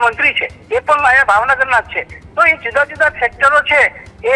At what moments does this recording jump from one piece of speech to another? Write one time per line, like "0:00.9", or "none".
none